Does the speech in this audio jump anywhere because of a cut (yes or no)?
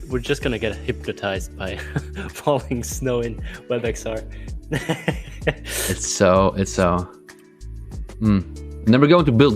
no